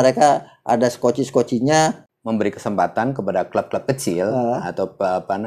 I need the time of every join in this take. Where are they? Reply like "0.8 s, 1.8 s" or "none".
2.1 s